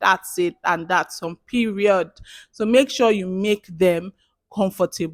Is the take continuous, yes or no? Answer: yes